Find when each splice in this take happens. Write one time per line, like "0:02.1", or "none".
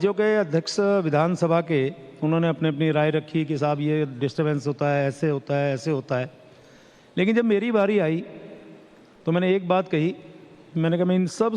0:02.9